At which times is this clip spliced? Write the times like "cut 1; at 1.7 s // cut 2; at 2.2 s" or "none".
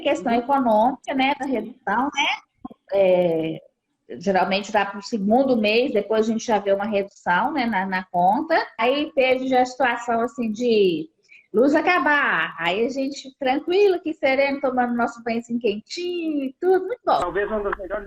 cut 1; at 8.7 s // cut 2; at 17.2 s